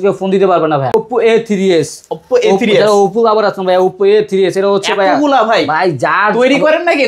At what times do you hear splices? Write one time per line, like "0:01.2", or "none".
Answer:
0:00.9